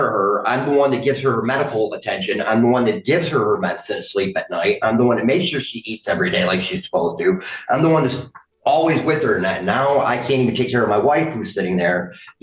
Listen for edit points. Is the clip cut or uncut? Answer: uncut